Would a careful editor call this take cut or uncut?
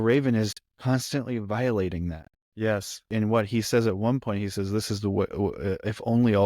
cut